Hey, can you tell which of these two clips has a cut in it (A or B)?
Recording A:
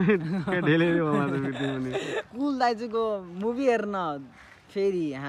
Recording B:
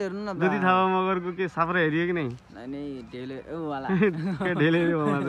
A